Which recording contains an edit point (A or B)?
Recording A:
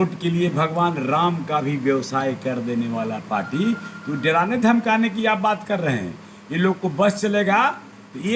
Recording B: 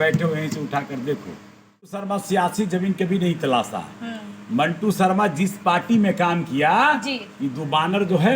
B